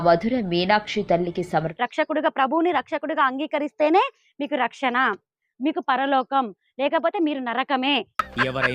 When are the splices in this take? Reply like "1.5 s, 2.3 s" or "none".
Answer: 1.7 s